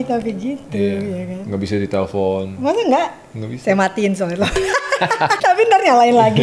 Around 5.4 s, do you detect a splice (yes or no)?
yes